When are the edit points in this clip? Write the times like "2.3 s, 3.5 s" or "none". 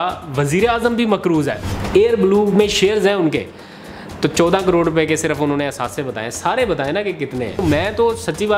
1.7 s, 7.6 s